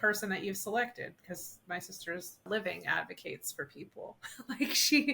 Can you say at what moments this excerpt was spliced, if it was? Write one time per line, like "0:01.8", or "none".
0:02.4